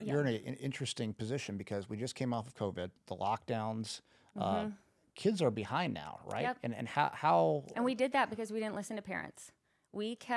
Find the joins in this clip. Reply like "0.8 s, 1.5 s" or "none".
3.0 s

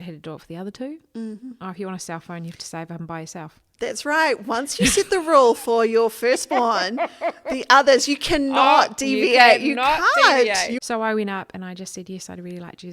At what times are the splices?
10.8 s

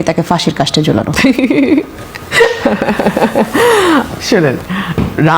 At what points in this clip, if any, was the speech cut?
none

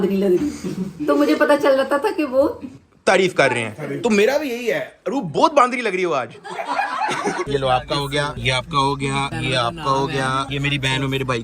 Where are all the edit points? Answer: 7.4 s

